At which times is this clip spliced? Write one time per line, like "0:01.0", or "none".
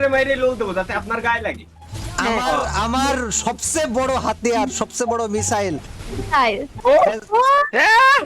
0:01.8